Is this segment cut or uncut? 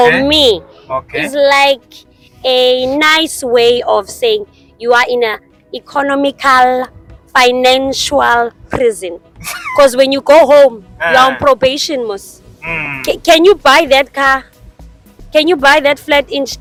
uncut